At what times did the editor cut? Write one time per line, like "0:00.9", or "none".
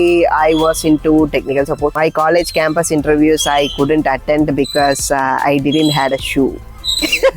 0:02.0